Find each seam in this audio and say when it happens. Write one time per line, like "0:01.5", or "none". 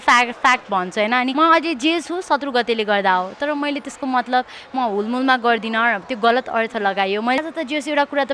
0:01.3
0:07.4